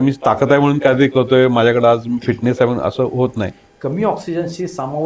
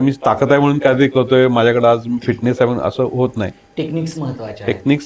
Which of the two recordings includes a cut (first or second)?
first